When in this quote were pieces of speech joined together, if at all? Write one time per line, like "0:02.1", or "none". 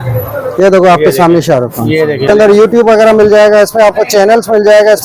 0:02.3